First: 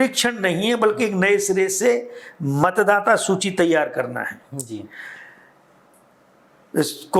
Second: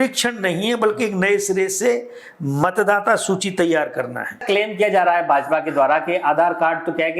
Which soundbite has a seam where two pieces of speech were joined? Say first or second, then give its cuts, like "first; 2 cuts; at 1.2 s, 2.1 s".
second; 1 cut; at 4.4 s